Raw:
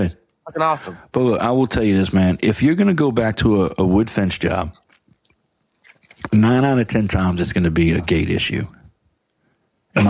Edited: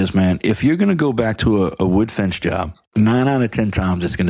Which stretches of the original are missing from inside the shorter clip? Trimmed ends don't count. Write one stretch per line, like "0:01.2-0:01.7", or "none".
0:04.8-0:06.1